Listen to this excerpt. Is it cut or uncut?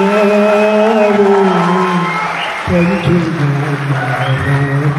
uncut